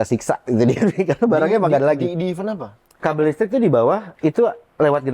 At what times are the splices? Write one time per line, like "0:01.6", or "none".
0:02.9
0:04.1